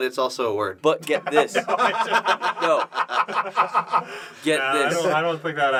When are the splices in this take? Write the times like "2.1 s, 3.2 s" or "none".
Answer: none